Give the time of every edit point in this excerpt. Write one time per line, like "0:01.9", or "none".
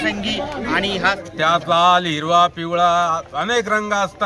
0:01.2